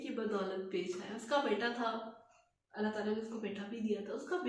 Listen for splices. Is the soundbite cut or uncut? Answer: uncut